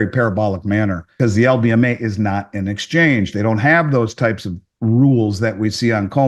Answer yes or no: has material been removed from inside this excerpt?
yes